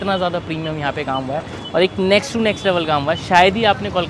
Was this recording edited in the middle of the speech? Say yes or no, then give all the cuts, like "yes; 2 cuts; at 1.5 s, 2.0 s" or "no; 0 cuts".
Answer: no; 0 cuts